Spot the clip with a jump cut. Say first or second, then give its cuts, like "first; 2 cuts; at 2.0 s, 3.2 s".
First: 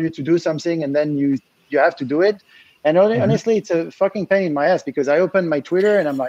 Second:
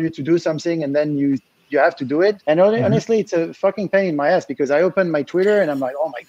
second; 1 cut; at 2.4 s